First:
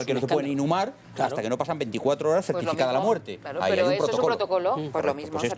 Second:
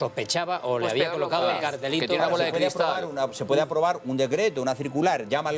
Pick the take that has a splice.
second; 1 cut; at 1.2 s

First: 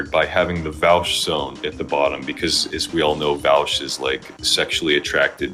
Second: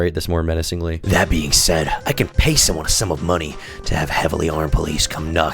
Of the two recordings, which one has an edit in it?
second; 1 cut; at 1.0 s

